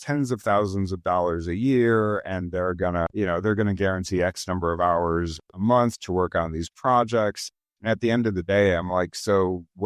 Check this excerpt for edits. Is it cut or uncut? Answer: uncut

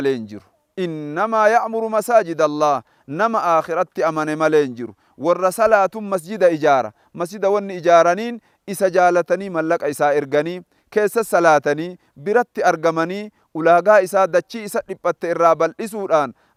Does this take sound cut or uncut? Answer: uncut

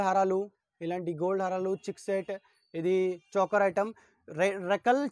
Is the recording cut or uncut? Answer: uncut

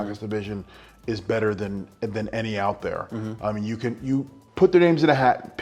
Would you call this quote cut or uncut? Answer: cut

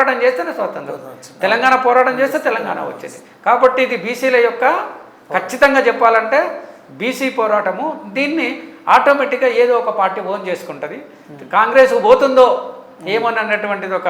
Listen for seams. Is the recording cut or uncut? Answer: uncut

